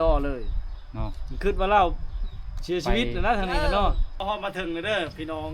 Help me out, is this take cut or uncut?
cut